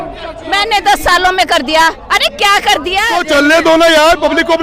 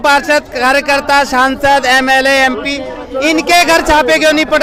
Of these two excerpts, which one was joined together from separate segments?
first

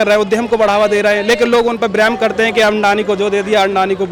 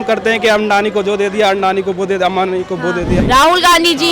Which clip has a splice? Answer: second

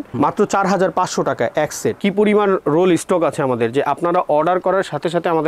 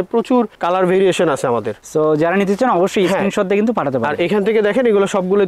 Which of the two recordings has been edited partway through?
first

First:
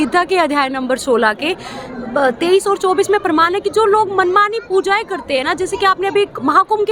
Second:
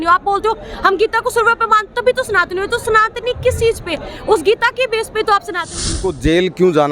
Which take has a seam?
second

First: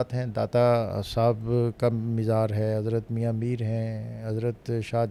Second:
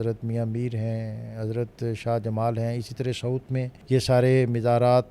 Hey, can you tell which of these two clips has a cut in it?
second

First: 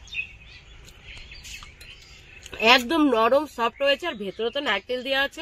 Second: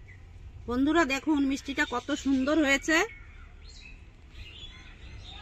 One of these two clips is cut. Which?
first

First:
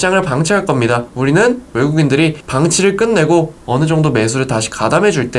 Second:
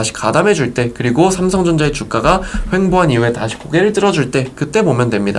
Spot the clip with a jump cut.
first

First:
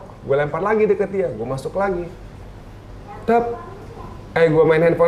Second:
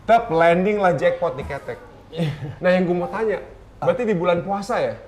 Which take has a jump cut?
second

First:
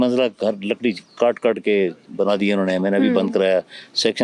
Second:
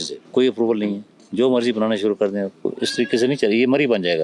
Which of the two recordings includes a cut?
second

